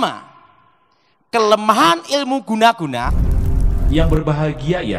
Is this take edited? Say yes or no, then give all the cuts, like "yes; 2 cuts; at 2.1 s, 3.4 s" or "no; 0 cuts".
yes; 1 cut; at 3.1 s